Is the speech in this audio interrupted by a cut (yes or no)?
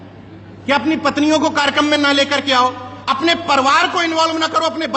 no